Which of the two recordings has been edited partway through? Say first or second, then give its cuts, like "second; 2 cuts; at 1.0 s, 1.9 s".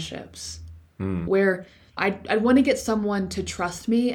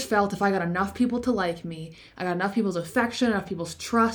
first; 1 cut; at 1.2 s